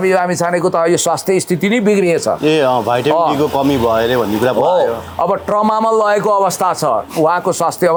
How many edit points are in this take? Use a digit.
0